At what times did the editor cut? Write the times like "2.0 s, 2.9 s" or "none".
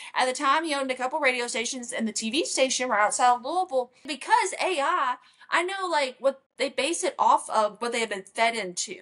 4.1 s